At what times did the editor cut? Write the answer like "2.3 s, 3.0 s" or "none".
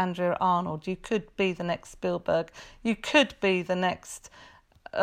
none